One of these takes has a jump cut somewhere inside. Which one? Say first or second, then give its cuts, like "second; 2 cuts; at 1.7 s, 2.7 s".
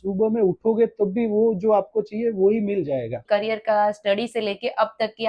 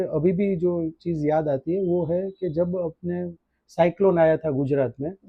first; 1 cut; at 3.2 s